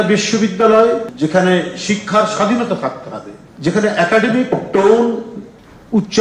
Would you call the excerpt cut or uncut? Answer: cut